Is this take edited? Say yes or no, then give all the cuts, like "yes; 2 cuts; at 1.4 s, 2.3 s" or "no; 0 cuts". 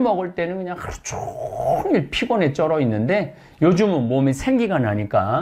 no; 0 cuts